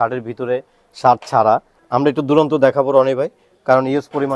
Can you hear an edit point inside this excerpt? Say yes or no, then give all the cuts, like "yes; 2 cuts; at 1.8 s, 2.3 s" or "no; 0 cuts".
yes; 1 cut; at 1.8 s